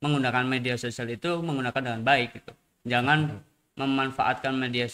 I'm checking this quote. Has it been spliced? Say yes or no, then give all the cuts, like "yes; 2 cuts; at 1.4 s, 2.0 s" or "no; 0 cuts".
no; 0 cuts